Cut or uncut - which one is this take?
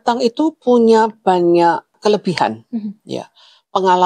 cut